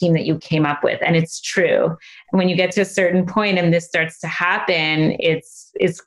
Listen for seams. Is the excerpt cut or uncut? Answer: uncut